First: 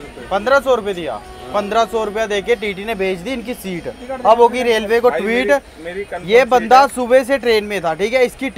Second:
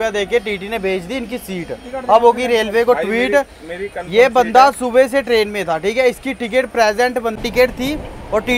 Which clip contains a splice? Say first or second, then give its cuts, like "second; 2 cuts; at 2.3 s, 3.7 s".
second; 1 cut; at 7.3 s